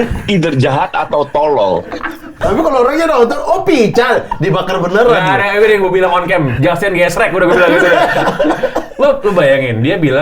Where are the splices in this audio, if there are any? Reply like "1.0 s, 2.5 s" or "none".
2.4 s